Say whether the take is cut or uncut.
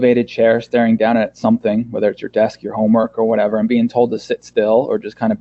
uncut